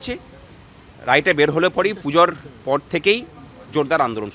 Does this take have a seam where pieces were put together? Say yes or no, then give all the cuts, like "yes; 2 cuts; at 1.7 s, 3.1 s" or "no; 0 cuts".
no; 0 cuts